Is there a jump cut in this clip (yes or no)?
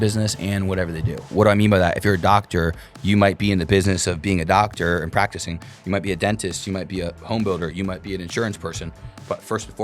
yes